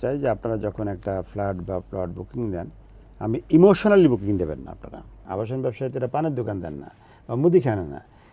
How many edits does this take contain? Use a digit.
1